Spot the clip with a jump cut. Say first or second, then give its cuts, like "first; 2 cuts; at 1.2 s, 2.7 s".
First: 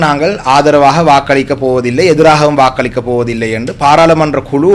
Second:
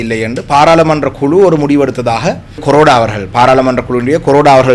second; 1 cut; at 2.6 s